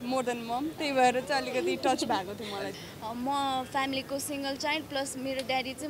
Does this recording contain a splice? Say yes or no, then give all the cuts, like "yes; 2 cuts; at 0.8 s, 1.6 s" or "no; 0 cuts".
yes; 1 cut; at 2.8 s